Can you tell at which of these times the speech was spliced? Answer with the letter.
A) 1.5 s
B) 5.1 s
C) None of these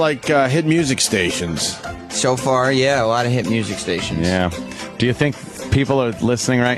B